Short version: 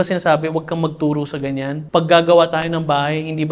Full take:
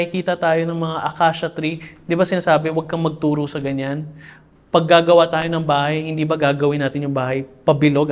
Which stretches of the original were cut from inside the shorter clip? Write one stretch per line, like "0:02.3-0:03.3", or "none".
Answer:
0:04.0-0:04.6